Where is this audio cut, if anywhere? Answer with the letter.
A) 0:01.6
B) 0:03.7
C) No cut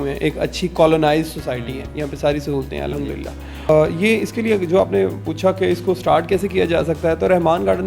B